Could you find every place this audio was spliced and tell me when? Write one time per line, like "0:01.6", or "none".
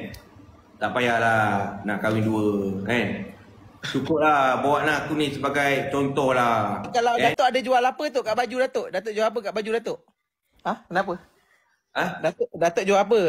0:07.0

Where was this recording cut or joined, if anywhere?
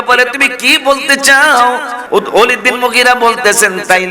0:02.0

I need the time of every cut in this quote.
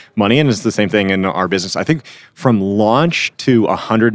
none

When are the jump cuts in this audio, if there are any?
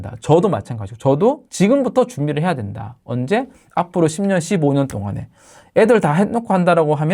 none

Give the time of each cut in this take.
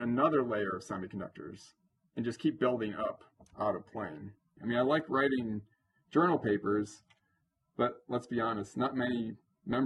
0:04.5

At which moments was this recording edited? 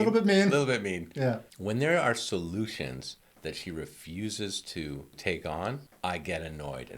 0:01.5
0:05.2
0:05.9

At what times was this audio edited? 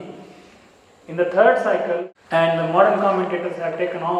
0:02.1

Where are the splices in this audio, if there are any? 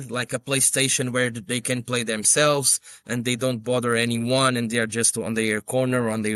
none

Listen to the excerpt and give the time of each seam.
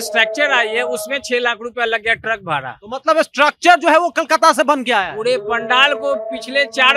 none

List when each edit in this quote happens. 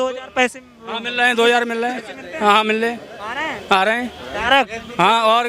none

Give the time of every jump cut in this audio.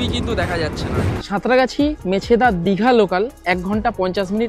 0:01.2

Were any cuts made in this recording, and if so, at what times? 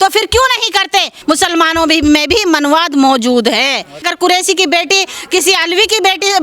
0:01.1
0:04.1

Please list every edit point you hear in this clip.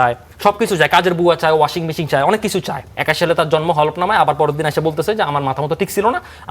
0:02.9

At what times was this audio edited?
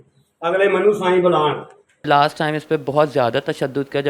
0:02.0

